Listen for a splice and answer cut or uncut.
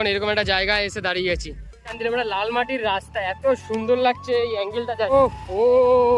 cut